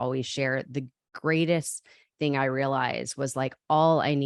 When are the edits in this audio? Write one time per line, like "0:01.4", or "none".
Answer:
none